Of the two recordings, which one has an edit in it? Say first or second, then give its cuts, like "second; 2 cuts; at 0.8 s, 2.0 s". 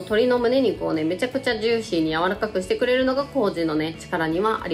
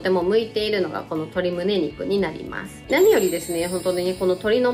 second; 1 cut; at 2.8 s